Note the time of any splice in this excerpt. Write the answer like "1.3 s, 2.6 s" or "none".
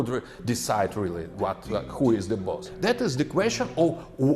2.7 s